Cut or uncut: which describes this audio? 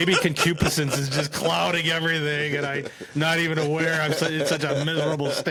uncut